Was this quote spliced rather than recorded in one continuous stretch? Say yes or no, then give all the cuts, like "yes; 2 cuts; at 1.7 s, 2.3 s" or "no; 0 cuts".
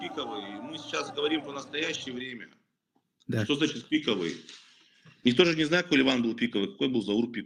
no; 0 cuts